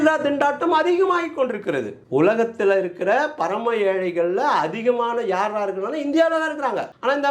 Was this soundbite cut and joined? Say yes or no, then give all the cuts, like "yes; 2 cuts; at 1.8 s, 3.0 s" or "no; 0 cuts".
yes; 1 cut; at 1.9 s